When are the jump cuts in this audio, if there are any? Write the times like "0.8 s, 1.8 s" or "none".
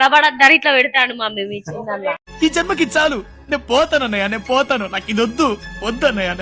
2.1 s